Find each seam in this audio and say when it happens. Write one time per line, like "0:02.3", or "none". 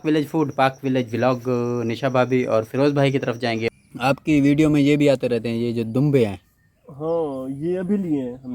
0:03.7